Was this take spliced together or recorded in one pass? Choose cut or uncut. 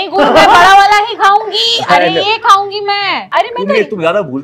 cut